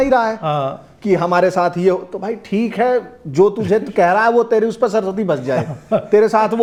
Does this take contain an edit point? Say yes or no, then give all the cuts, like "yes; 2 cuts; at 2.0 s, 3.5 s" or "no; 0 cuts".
no; 0 cuts